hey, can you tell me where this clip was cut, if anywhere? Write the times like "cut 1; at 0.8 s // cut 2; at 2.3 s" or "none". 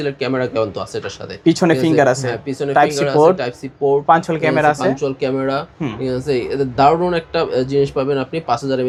none